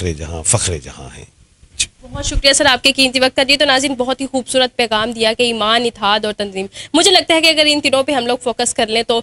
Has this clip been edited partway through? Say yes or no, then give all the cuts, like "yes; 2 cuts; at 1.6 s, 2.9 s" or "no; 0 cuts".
no; 0 cuts